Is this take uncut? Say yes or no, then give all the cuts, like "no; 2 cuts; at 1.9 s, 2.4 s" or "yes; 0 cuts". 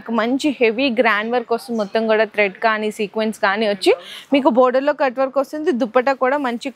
yes; 0 cuts